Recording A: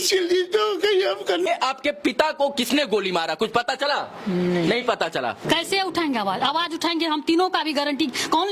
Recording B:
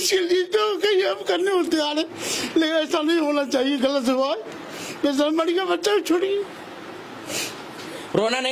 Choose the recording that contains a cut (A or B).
A